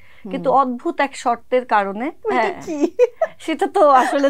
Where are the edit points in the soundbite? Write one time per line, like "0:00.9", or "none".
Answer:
0:02.2

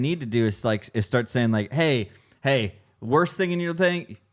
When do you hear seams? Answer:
none

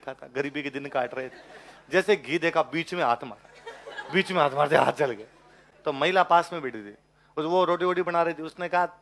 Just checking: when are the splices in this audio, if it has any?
none

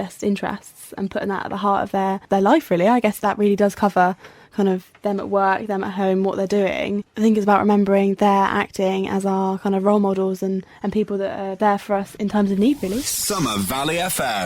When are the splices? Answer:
0:13.1

